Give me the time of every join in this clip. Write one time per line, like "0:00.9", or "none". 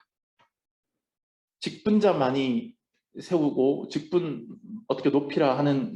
none